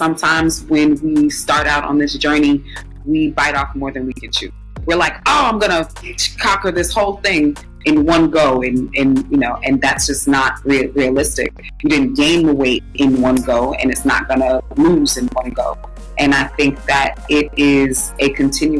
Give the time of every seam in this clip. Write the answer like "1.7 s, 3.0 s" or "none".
none